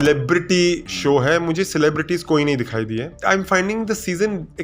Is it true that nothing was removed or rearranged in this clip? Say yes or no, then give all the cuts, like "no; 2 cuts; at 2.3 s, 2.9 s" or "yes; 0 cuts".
no; 2 cuts; at 0.9 s, 3.2 s